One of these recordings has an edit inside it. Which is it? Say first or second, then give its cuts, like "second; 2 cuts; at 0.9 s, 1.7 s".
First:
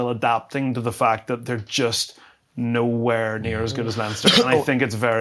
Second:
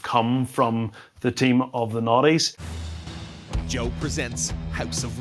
second; 1 cut; at 2.6 s